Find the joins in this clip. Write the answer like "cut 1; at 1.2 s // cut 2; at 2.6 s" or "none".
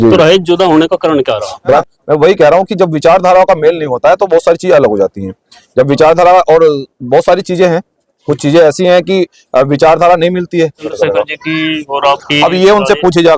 cut 1; at 1.8 s // cut 2; at 10.9 s